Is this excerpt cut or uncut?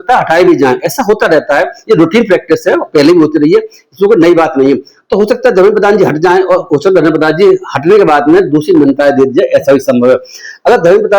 uncut